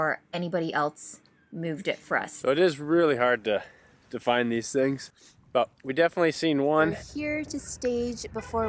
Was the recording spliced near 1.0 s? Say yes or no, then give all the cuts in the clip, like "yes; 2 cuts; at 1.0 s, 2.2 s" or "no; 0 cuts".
no; 2 cuts; at 2.3 s, 7.1 s